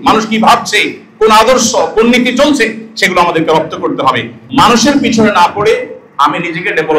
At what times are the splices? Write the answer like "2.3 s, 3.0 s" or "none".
4.3 s